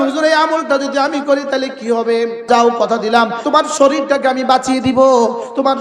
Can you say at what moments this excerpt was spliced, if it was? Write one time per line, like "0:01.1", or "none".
0:02.5
0:03.4